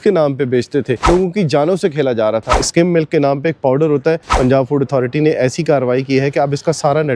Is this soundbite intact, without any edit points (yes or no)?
no